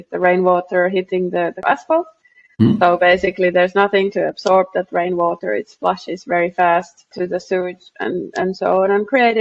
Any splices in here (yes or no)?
yes